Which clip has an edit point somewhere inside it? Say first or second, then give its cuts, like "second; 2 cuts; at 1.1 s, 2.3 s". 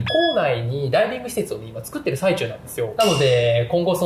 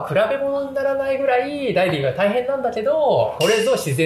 first; 1 cut; at 2.9 s